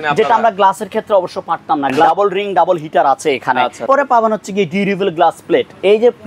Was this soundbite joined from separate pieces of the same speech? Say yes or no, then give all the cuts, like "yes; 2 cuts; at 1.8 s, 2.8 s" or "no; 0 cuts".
yes; 2 cuts; at 2.1 s, 3.8 s